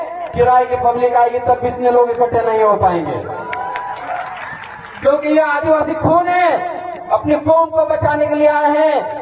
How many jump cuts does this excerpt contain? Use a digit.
0